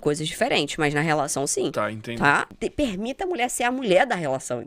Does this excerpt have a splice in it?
yes; 1 cut; at 2.5 s

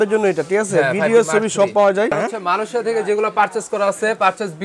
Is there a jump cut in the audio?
yes; 1 cut; at 2.2 s

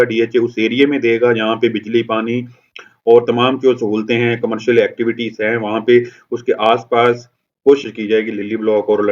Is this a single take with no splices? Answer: no; 1 cut; at 7.9 s

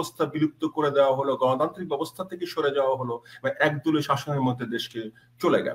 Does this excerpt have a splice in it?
no; 0 cuts

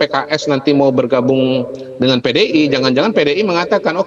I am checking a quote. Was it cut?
no; 0 cuts

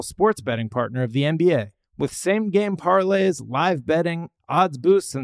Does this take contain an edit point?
no; 0 cuts

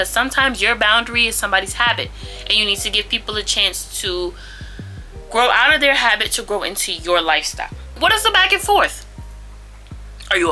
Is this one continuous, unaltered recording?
no; 1 cut; at 8.0 s

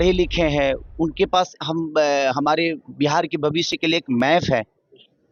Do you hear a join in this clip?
no; 0 cuts

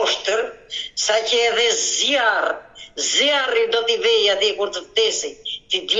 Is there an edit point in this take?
no; 0 cuts

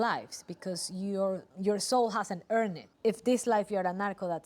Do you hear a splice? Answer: yes; 2 cuts; at 1.5 s, 2.9 s

